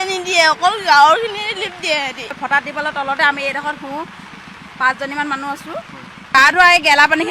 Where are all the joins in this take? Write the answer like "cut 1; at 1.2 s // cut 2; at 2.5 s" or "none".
cut 1; at 2.4 s // cut 2; at 6.3 s